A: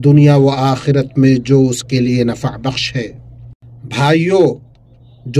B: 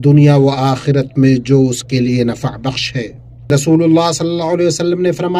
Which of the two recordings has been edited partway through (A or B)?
B